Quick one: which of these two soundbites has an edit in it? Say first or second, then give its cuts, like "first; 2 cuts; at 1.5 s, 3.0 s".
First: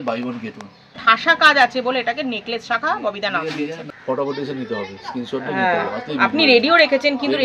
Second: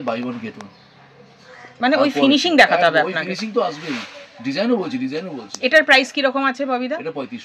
first; 2 cuts; at 1.0 s, 3.9 s